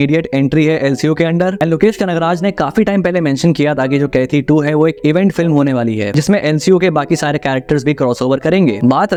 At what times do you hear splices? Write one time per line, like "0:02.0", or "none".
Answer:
none